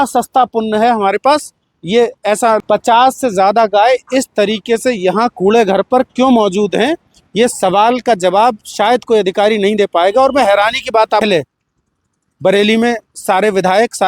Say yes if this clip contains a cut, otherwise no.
yes